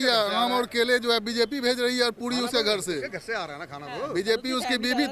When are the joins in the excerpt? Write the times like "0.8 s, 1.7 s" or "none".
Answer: none